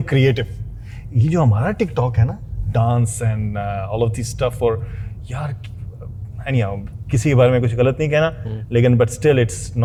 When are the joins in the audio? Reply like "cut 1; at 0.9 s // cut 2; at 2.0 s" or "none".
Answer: none